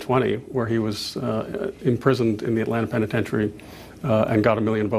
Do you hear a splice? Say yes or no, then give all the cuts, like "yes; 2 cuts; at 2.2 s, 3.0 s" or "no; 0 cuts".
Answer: no; 0 cuts